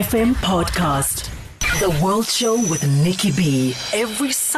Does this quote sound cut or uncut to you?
cut